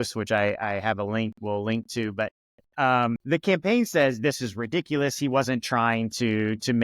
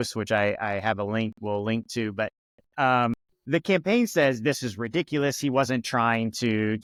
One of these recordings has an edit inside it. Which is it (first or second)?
first